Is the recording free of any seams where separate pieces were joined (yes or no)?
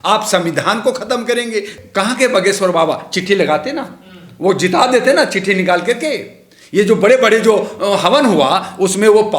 no